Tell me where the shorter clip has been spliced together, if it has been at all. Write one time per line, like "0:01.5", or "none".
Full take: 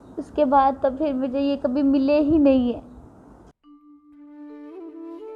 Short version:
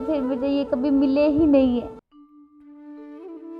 0:02.1